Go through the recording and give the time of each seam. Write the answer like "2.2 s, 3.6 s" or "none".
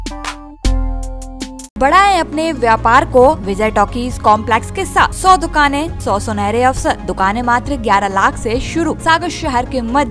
1.8 s, 3.5 s, 5.2 s, 5.9 s, 7.1 s, 9.0 s